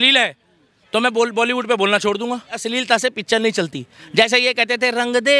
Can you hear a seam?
yes; 1 cut; at 2.5 s

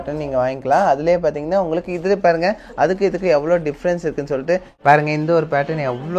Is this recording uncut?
no; 1 cut; at 4.8 s

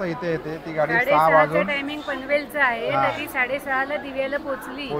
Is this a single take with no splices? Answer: yes; 0 cuts

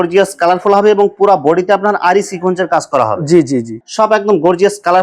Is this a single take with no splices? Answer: no; 1 cut; at 3.8 s

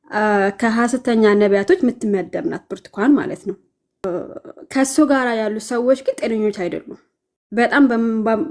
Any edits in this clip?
yes; 1 cut; at 4.0 s

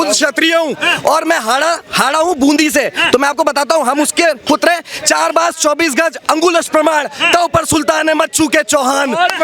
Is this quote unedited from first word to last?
yes; 0 cuts

